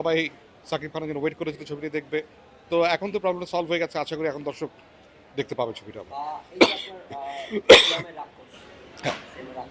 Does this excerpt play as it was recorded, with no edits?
yes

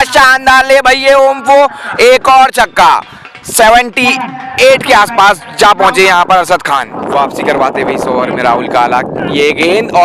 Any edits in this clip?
no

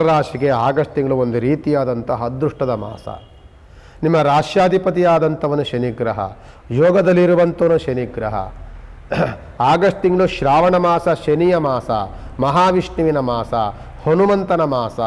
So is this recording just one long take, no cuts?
yes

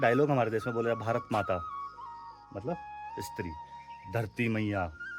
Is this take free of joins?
yes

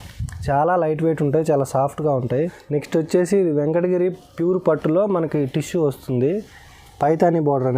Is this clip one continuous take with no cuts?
no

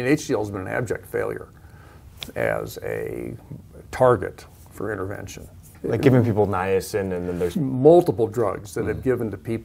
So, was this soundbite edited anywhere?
yes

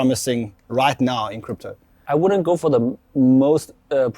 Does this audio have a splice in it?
yes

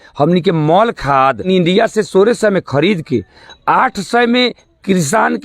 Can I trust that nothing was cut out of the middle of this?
no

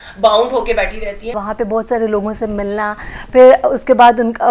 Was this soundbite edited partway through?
yes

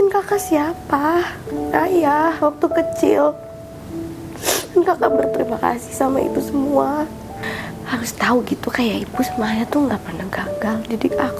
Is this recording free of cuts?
no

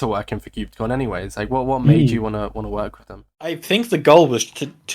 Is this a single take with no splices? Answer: no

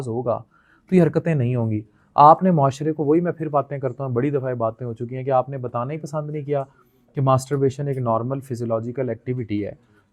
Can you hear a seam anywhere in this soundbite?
no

